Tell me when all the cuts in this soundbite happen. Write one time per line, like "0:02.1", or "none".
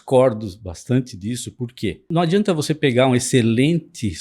0:02.1